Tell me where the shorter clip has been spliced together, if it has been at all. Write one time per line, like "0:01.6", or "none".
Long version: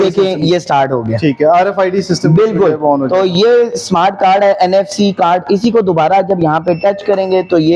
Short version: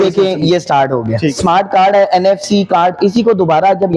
0:01.3